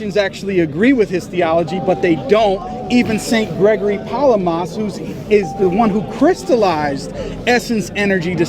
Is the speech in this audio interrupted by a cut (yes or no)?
no